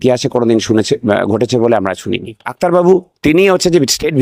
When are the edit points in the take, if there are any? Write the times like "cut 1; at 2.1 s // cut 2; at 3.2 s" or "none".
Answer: cut 1; at 2.4 s